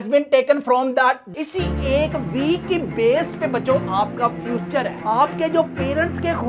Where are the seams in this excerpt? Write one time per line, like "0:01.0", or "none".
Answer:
0:01.2